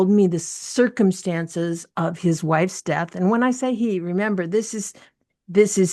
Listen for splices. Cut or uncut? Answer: uncut